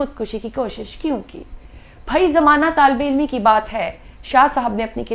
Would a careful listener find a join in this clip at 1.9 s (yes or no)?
no